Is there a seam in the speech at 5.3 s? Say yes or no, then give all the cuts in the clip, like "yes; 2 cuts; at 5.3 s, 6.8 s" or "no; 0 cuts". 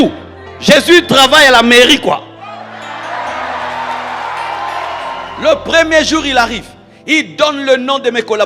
yes; 1 cut; at 5.3 s